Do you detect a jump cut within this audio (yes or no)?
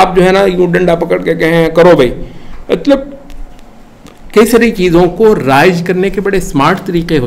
no